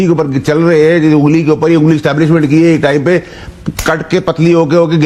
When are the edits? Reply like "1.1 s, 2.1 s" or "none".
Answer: none